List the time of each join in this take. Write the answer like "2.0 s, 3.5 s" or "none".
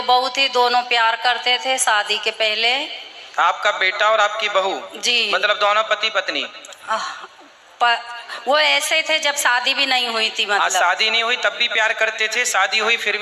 none